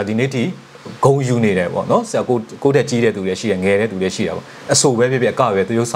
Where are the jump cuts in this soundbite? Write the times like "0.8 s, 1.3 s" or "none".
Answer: none